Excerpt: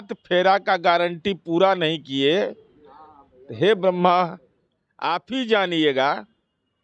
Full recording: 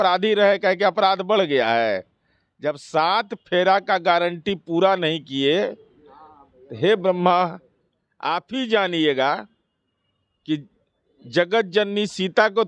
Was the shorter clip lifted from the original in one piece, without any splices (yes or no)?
yes